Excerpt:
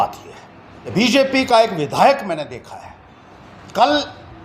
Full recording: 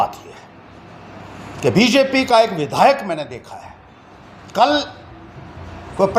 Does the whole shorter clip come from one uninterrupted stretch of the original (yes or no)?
no